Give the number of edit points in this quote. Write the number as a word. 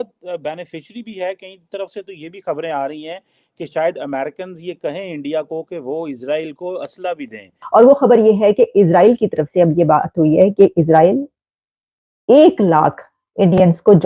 one